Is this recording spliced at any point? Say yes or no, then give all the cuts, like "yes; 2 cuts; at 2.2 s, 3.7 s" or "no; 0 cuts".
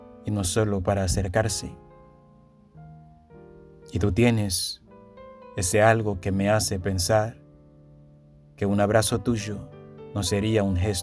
no; 0 cuts